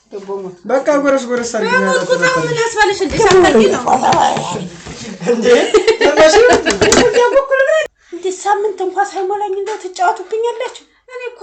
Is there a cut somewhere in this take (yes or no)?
yes